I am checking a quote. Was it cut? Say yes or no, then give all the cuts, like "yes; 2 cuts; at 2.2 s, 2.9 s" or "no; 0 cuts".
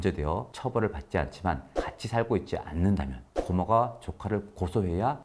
no; 0 cuts